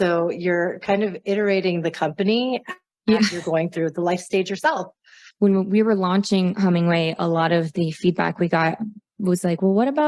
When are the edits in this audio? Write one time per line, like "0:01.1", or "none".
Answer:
0:05.2